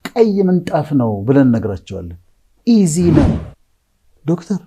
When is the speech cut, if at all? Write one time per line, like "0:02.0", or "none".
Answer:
0:03.3